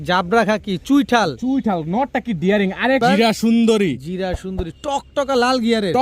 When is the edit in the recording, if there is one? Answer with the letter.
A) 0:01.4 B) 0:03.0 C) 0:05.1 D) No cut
B